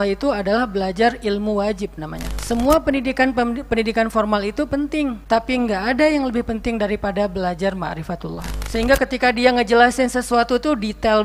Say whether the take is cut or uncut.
cut